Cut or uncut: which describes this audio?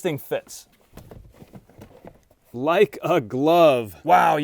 cut